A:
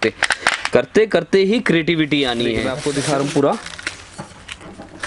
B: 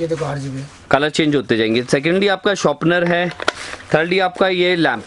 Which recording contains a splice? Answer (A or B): A